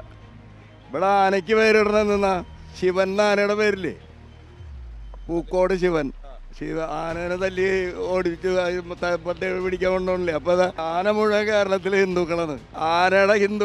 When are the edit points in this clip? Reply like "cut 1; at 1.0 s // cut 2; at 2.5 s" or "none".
cut 1; at 10.8 s // cut 2; at 12.6 s